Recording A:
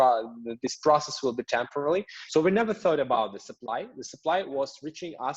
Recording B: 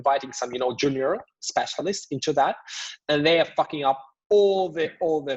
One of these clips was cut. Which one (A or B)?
A